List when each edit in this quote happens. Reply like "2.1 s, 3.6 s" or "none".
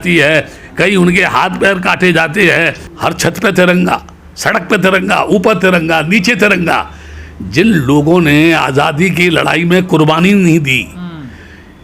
2.8 s